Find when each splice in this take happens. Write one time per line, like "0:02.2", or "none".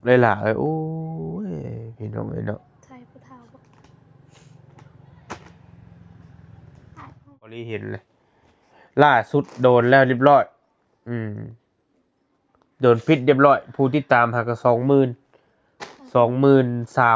0:07.5

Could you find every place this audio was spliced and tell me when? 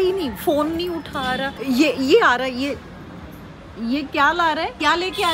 0:01.6

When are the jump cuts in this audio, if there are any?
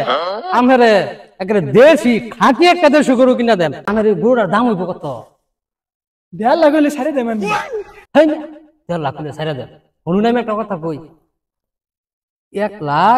0:03.8

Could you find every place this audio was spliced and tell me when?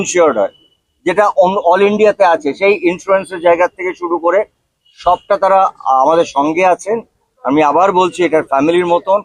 none

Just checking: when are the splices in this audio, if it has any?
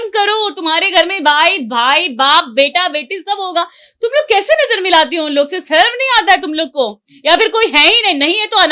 none

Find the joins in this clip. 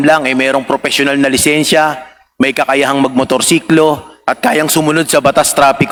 none

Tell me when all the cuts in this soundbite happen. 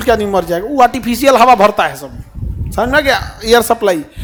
none

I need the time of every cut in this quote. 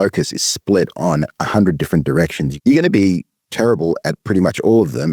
0:02.5

